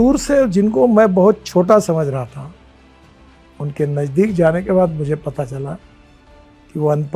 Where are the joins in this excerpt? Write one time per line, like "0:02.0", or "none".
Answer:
none